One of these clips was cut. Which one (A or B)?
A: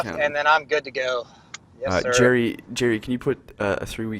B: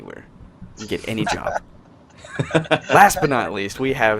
B